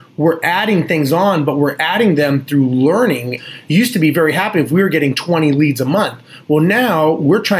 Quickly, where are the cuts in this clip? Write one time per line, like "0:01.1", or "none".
0:03.6